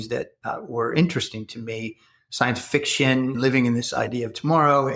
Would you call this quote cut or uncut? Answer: cut